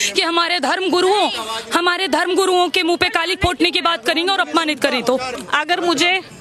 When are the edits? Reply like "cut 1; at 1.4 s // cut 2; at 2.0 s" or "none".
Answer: cut 1; at 5.4 s